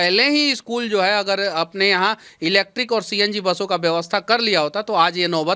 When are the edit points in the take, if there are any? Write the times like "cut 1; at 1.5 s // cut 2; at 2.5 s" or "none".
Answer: none